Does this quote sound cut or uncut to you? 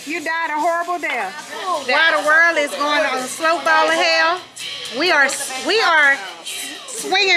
cut